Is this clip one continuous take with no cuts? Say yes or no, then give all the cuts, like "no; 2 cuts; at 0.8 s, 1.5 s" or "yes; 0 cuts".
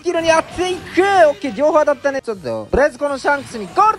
no; 1 cut; at 2.2 s